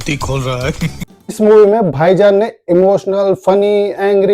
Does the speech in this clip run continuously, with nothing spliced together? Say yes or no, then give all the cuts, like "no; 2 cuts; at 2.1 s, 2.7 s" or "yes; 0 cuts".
no; 1 cut; at 1.3 s